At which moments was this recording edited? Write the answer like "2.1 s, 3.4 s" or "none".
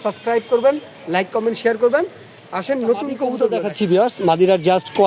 3.2 s